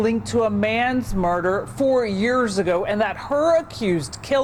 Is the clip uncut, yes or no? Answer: yes